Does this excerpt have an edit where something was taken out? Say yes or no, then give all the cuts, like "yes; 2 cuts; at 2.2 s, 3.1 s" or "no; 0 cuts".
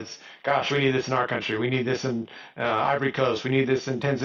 no; 0 cuts